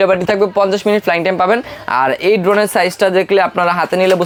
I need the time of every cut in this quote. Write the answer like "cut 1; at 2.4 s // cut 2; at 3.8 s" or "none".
none

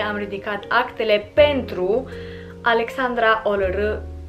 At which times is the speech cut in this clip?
none

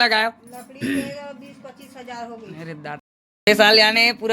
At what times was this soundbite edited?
cut 1; at 3.2 s

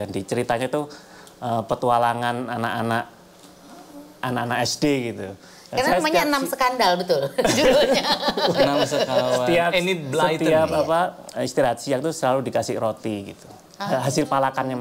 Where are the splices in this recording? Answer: none

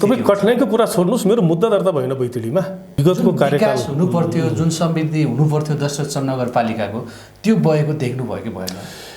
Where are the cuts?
cut 1; at 2.9 s

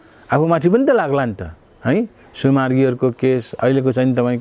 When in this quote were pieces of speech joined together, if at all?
none

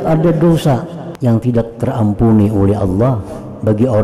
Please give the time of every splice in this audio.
cut 1; at 1.0 s

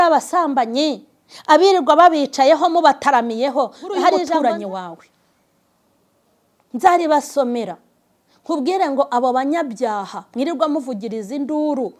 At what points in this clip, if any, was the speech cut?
cut 1; at 4.4 s

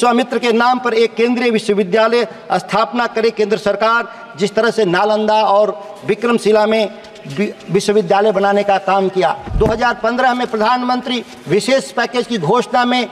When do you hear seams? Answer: cut 1; at 9.4 s

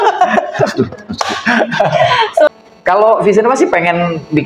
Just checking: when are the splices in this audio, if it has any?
cut 1; at 2.5 s

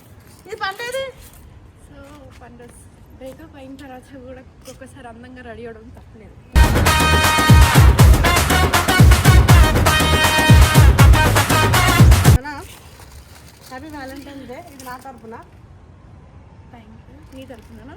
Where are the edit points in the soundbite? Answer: cut 1; at 12.4 s

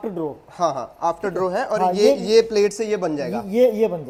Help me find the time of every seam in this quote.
none

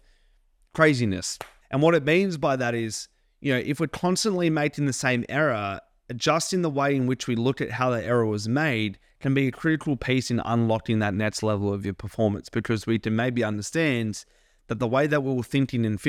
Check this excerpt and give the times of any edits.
none

